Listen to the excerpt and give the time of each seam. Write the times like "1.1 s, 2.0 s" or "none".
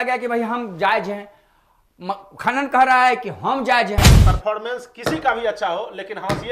4.1 s